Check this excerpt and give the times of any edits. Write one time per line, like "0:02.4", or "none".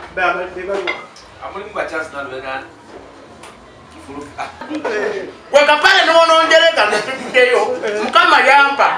0:04.7